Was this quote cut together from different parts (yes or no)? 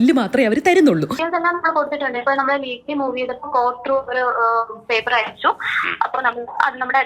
yes